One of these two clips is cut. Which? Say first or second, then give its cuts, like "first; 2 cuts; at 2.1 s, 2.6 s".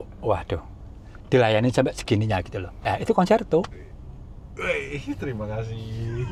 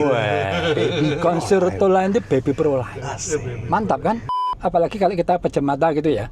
second; 1 cut; at 4.3 s